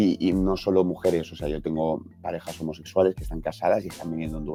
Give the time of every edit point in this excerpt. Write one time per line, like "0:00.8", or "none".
none